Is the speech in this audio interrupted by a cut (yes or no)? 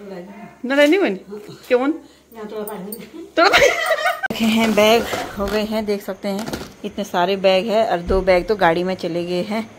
yes